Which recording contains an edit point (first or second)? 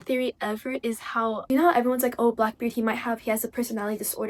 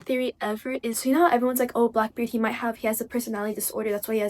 second